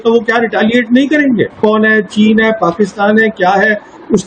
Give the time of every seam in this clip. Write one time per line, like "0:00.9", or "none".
0:01.6